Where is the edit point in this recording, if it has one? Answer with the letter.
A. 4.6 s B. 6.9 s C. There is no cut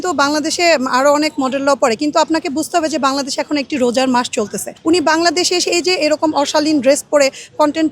A